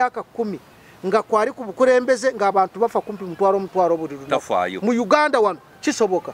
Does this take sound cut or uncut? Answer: uncut